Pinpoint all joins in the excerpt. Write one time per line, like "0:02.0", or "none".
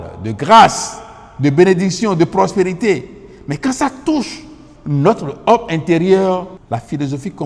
0:06.6